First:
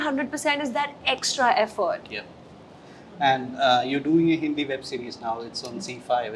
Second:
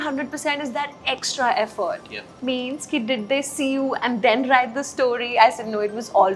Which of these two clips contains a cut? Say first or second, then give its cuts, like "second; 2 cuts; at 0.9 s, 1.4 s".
second; 1 cut; at 2.3 s